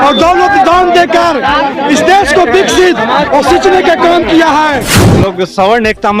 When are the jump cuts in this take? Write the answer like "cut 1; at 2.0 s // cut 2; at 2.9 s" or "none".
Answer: cut 1; at 4.9 s